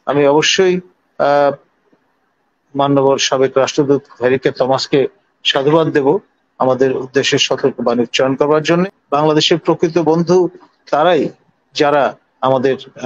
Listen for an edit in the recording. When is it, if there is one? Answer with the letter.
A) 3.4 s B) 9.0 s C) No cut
B